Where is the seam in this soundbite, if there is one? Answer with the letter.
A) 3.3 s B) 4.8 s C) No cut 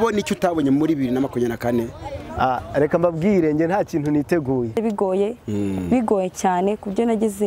B